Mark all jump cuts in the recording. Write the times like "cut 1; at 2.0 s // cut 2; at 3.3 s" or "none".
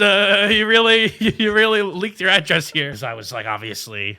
cut 1; at 2.9 s